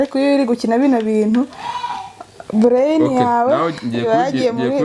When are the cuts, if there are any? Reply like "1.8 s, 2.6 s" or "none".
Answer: none

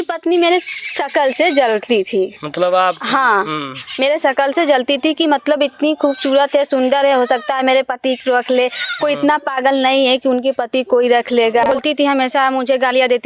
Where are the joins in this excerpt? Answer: 11.8 s

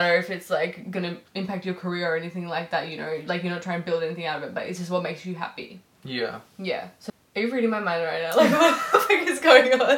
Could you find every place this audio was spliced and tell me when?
7.0 s

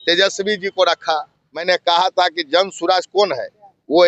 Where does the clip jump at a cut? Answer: 1.6 s

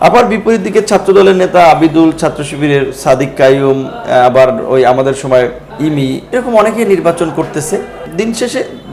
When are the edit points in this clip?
5.6 s, 8.0 s

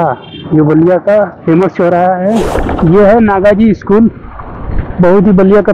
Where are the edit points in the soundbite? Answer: 2.5 s

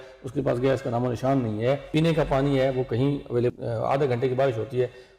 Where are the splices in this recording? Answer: 1.8 s, 3.5 s

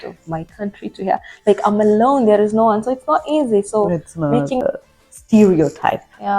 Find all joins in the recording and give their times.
4.6 s

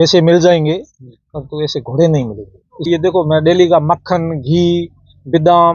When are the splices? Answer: 2.8 s

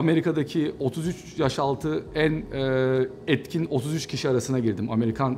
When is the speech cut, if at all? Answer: none

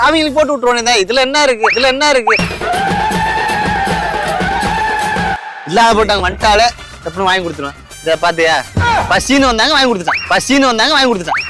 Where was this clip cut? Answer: none

